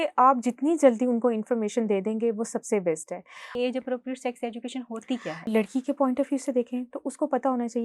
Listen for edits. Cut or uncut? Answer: cut